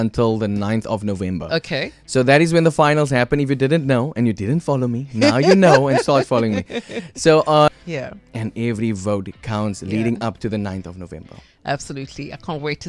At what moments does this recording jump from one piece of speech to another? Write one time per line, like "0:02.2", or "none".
0:07.7